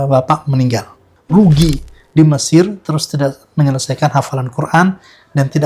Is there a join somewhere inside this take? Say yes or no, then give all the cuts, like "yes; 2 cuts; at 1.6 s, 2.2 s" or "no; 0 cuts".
yes; 1 cut; at 1.1 s